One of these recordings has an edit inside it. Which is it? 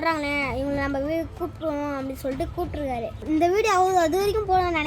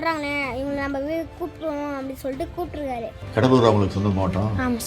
first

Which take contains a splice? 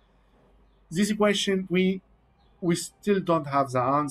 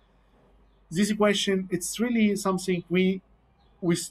first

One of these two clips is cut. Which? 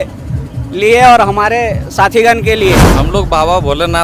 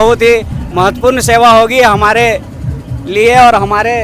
first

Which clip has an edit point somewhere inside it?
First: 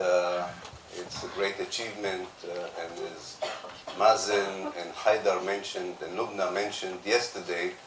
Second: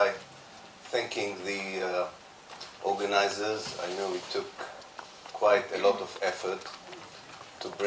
first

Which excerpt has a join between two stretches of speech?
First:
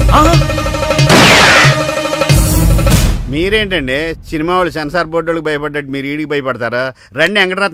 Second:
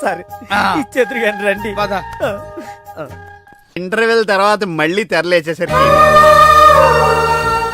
second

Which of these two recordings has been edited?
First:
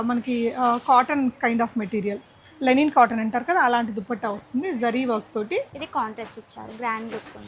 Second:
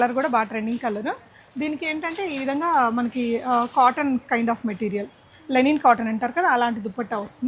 first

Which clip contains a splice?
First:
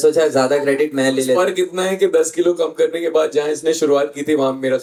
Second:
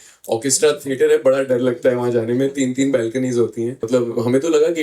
second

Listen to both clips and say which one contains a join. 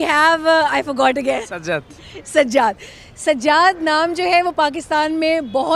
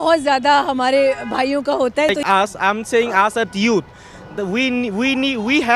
second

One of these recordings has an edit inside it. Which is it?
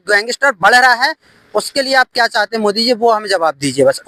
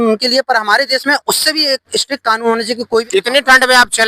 second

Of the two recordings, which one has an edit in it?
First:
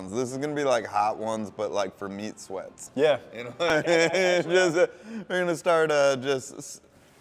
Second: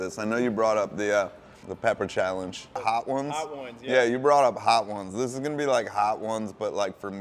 second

